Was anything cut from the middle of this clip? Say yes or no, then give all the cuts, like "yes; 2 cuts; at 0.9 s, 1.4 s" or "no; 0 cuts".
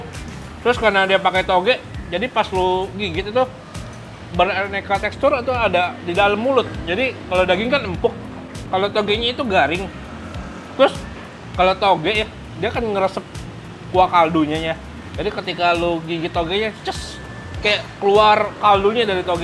no; 0 cuts